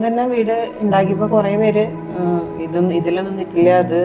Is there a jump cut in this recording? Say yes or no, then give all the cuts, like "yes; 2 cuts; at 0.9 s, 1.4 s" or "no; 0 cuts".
no; 0 cuts